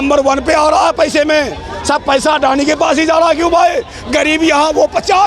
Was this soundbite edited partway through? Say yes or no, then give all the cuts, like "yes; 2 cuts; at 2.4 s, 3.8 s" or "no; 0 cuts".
no; 0 cuts